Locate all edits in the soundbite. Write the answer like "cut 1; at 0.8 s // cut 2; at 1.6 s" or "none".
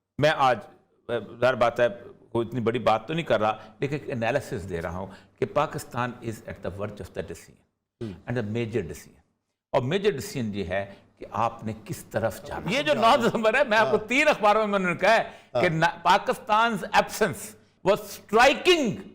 cut 1; at 12.6 s // cut 2; at 17.7 s